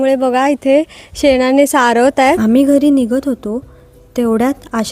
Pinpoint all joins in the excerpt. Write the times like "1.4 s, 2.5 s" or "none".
2.4 s